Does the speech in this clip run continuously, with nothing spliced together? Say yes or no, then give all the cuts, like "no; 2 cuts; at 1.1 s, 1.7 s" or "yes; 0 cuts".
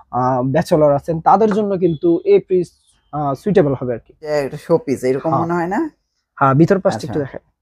no; 1 cut; at 4.3 s